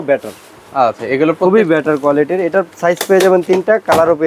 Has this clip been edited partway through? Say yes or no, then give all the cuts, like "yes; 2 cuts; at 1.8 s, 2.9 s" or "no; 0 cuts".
no; 0 cuts